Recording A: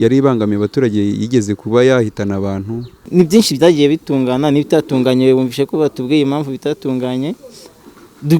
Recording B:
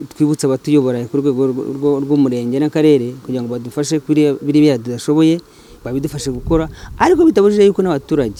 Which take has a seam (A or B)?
A